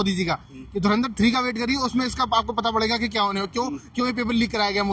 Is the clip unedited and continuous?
yes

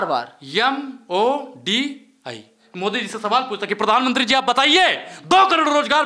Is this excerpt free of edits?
no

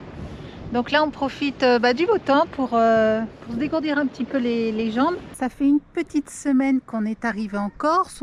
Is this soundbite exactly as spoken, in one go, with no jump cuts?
no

